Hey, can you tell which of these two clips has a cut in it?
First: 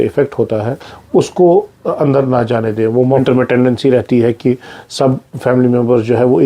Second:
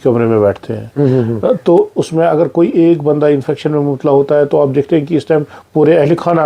first; 1 cut; at 3.2 s

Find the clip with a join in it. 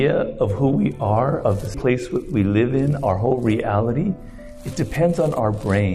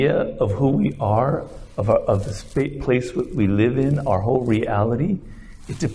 first; 1 cut; at 1.7 s

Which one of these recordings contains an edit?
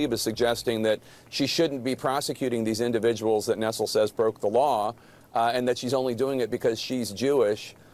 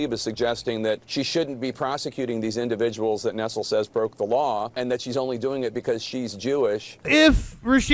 second; 3 cuts; at 1.1 s, 4.8 s, 7.1 s

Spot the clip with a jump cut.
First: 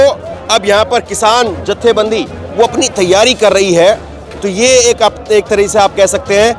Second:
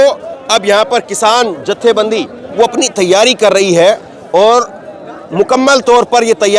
first; 1 cut; at 4.1 s

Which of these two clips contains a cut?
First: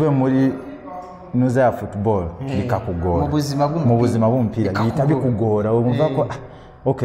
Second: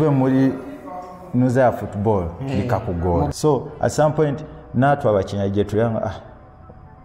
second; 1 cut; at 3.3 s

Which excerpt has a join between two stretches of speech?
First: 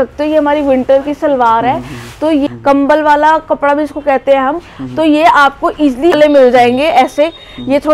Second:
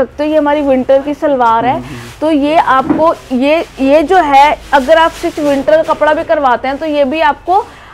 first; 2 cuts; at 2.5 s, 6.2 s

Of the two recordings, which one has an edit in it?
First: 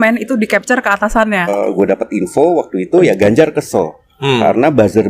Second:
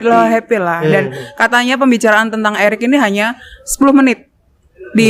first; 1 cut; at 1.5 s

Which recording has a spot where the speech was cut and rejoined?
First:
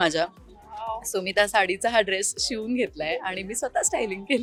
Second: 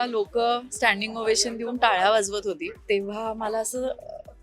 second; 1 cut; at 2.7 s

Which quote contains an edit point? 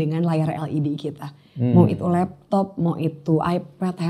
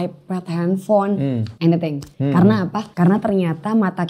second; 3 cuts; at 1.5 s, 2.1 s, 2.8 s

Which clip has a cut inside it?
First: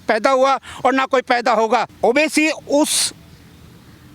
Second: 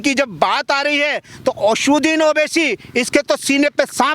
first; 1 cut; at 1.9 s

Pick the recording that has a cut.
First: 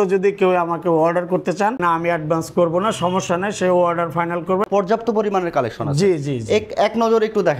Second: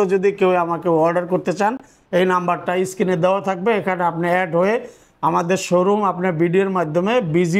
first; 2 cuts; at 1.8 s, 4.7 s

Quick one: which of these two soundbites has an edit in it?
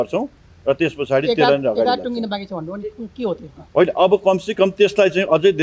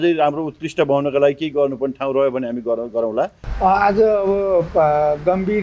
second; 1 cut; at 3.4 s

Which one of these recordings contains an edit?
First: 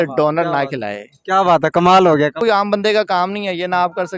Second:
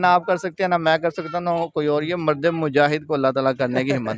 first; 1 cut; at 2.4 s

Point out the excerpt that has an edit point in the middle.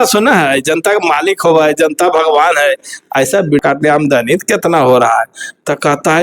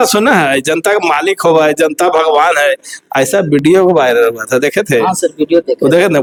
first; 1 cut; at 3.6 s

